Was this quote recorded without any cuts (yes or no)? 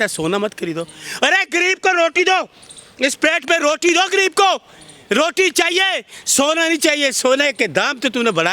yes